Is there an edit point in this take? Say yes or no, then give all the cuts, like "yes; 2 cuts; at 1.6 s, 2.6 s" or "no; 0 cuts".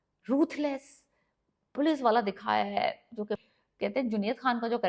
yes; 1 cut; at 3.4 s